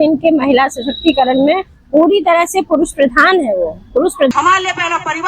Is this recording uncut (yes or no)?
no